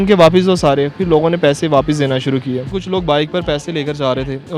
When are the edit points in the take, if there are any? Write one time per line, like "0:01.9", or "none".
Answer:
0:02.7